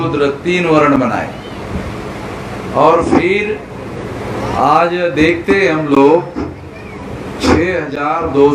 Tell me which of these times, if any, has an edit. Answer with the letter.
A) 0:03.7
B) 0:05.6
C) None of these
C